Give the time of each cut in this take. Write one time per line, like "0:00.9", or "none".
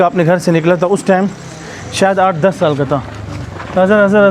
none